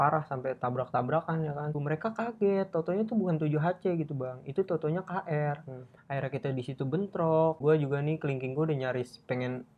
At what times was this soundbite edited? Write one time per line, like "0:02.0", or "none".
0:01.8
0:07.6